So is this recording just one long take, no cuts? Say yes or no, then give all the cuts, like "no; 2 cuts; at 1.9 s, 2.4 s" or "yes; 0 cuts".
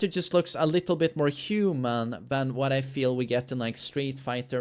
yes; 0 cuts